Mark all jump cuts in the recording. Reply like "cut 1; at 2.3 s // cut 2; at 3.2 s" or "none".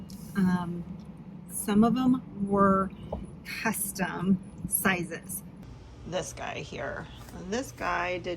cut 1; at 5.7 s